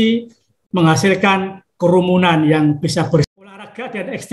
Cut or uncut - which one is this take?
cut